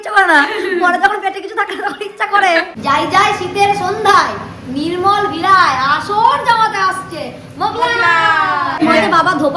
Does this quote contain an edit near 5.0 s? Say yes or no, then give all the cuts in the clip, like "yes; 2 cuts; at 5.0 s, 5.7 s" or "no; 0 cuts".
no; 2 cuts; at 2.7 s, 8.8 s